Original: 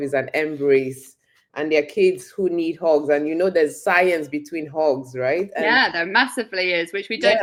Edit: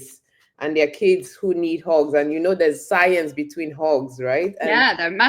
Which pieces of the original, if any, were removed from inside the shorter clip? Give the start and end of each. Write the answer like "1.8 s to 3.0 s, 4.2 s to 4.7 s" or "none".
none